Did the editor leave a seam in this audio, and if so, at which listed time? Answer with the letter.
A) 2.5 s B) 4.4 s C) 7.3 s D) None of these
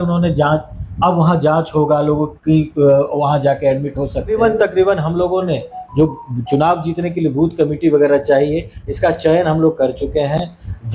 B